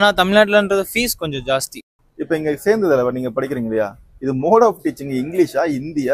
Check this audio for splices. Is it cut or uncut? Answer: cut